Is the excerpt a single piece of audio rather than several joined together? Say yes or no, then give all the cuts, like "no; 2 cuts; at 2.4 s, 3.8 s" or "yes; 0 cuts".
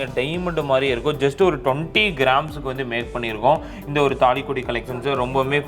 yes; 0 cuts